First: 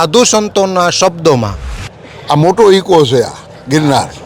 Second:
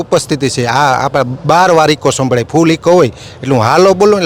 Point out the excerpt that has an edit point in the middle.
first; 1 cut; at 1.7 s

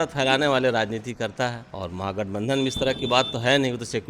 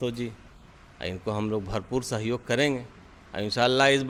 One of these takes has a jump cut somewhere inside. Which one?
first; 1 cut; at 1.7 s

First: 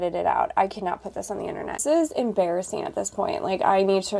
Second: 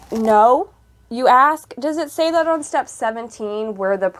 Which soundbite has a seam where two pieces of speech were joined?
first; 1 cut; at 1.8 s

